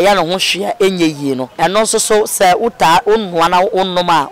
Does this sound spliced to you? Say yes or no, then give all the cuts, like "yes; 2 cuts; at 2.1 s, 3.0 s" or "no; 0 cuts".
yes; 1 cut; at 1.5 s